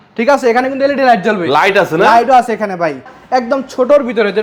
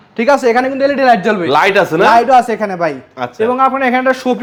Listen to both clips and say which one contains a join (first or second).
first